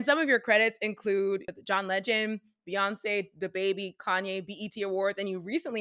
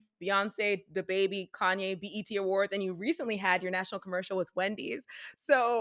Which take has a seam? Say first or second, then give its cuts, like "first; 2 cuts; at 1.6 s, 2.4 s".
first; 1 cut; at 1.5 s